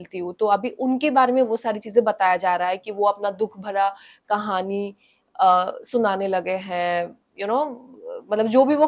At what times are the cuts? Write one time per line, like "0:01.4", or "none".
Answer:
none